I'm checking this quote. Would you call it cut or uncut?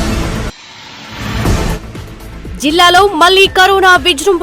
cut